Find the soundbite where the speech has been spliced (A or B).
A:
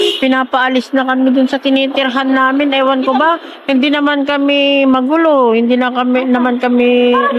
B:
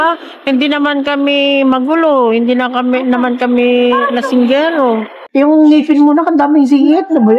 B